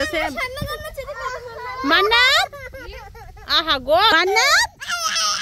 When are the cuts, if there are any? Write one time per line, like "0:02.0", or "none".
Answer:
none